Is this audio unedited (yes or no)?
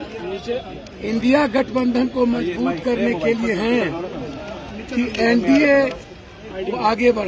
yes